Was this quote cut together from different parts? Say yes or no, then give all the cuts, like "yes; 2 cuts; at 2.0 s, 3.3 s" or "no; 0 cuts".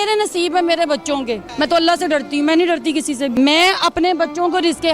yes; 2 cuts; at 1.4 s, 3.3 s